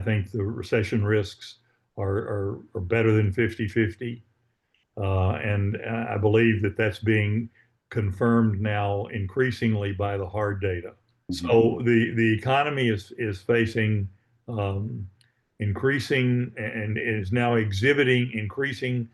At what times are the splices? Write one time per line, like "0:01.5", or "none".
0:11.1